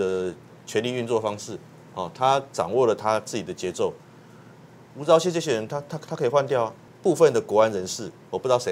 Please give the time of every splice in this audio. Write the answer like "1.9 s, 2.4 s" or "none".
6.8 s